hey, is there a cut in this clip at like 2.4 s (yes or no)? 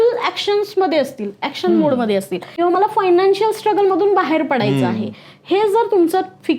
yes